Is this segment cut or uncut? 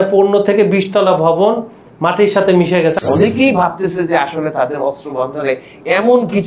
cut